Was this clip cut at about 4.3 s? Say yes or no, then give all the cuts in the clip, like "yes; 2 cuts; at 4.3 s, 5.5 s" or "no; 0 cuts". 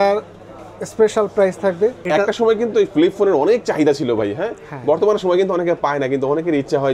no; 1 cut; at 2.0 s